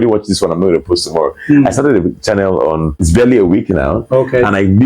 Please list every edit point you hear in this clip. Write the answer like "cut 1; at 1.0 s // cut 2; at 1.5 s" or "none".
cut 1; at 3.0 s // cut 2; at 4.1 s